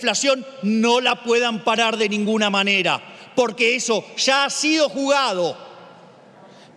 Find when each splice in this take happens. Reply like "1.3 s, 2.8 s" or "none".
none